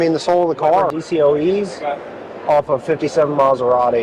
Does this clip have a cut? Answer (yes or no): yes